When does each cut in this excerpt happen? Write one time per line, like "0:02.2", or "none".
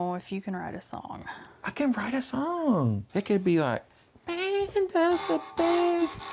0:03.0